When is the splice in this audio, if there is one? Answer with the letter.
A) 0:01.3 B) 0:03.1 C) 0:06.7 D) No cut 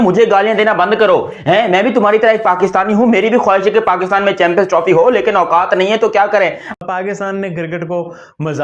C